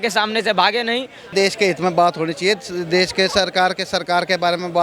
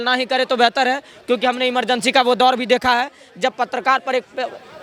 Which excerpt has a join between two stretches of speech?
first; 1 cut; at 1.3 s

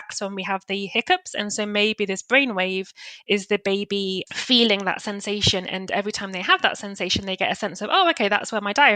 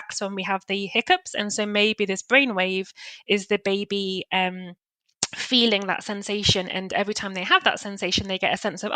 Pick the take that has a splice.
first; 1 cut; at 4.2 s

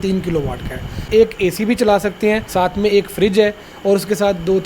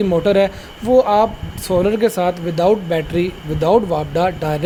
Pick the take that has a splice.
first; 2 cuts; at 1.0 s, 2.5 s

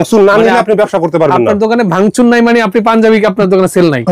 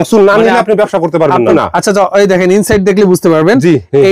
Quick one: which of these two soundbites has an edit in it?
second; 1 cut; at 1.5 s

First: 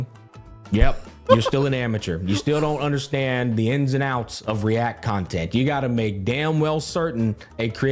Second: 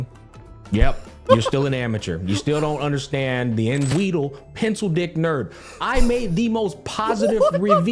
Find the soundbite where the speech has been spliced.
second; 1 cut; at 3.9 s

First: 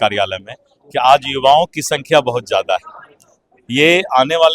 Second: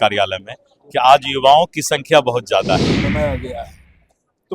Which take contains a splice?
second; 1 cut; at 3.0 s

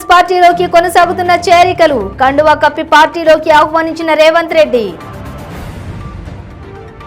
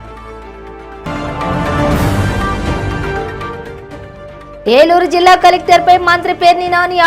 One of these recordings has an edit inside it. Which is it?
second; 1 cut; at 1.0 s

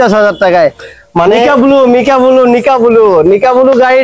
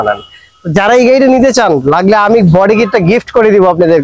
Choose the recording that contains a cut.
first; 1 cut; at 1.5 s

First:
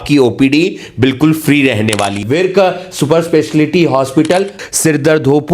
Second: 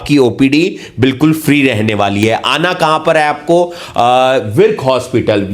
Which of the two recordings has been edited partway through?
first; 2 cuts; at 2.2 s, 4.6 s

